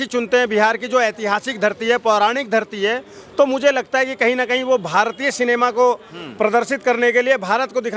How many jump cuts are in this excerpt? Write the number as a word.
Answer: zero